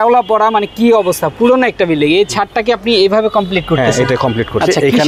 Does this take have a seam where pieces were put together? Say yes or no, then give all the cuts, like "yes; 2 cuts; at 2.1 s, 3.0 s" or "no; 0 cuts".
no; 0 cuts